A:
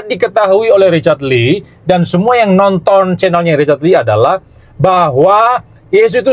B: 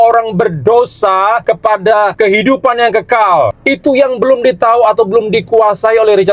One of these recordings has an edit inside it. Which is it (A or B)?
B